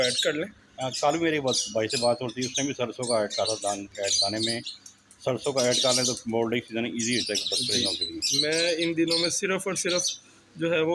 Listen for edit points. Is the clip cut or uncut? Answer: uncut